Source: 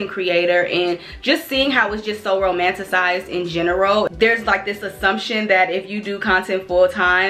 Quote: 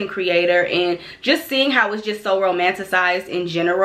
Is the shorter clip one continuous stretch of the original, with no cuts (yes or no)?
yes